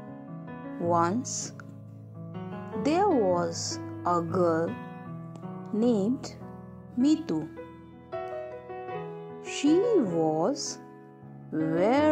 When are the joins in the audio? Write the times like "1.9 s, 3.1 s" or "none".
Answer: 0.8 s, 1.5 s, 2.8 s, 8.0 s, 9.4 s